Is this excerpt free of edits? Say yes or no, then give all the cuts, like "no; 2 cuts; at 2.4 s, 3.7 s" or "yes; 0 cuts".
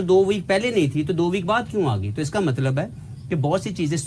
yes; 0 cuts